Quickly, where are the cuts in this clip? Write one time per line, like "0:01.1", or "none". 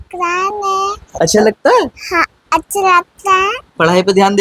0:01.0